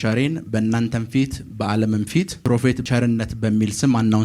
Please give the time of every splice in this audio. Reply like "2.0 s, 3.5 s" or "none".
2.8 s